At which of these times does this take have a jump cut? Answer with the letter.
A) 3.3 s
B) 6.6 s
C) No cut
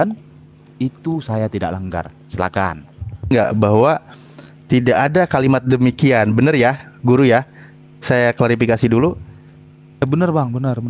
A